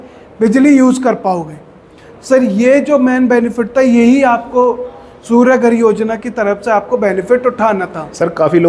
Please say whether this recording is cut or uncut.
uncut